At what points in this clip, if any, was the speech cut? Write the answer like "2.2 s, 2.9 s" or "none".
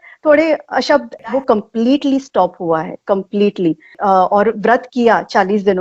1.1 s, 4.0 s

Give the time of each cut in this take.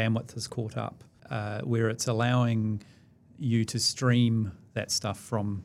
1.1 s

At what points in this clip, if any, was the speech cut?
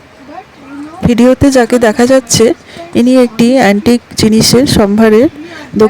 1.0 s

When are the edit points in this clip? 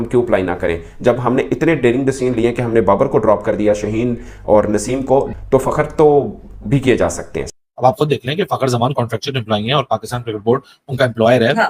7.5 s

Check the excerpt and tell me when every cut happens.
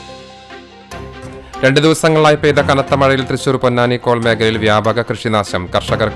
1.6 s

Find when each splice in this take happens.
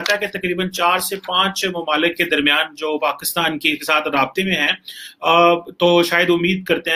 none

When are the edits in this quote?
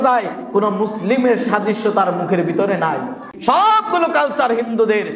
3.3 s

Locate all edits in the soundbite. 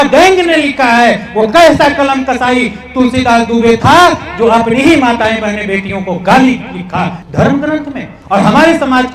7.2 s

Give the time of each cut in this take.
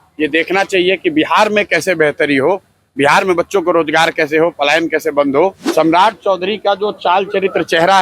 5.6 s

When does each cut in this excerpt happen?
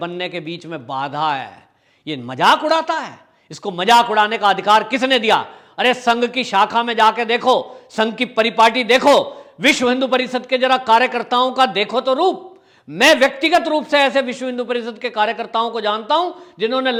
none

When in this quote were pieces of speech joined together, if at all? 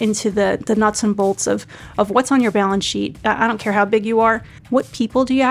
3.1 s, 4.5 s

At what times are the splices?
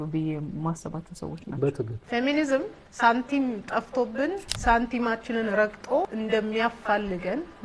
1.9 s, 2.8 s, 4.5 s

